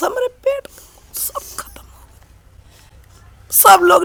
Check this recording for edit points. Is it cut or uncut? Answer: uncut